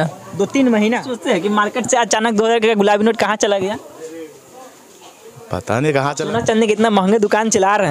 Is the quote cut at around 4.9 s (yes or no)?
no